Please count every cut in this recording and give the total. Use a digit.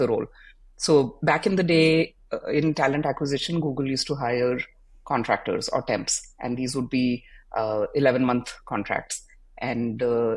0